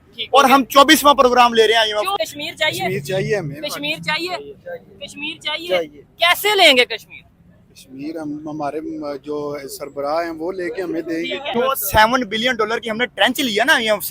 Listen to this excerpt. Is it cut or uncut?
cut